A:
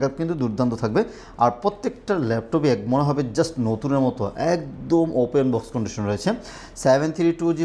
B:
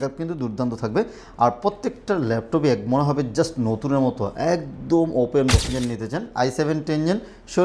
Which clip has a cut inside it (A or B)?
B